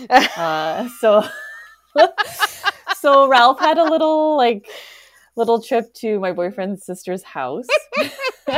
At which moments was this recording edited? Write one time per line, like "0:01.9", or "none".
0:07.6